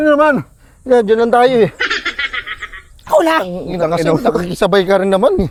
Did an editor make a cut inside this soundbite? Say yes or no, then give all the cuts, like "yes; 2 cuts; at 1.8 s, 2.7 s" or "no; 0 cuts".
no; 0 cuts